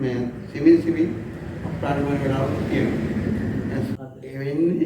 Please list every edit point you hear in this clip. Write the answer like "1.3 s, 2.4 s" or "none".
3.9 s